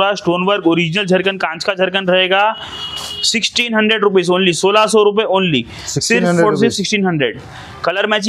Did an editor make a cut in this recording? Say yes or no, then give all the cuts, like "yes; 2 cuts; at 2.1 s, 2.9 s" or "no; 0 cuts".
no; 0 cuts